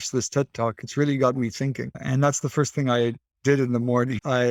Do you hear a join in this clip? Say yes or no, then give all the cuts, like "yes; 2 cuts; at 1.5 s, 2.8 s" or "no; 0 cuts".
no; 0 cuts